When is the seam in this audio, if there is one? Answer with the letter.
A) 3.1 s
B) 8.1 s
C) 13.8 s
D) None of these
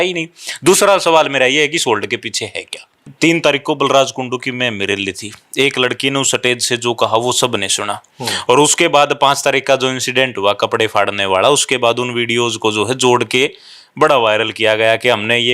A